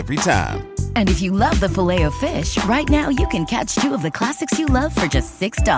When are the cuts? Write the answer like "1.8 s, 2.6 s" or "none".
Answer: none